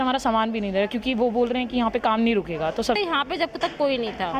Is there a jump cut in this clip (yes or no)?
yes